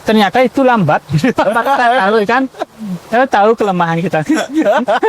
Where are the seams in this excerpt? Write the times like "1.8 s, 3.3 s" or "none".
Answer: none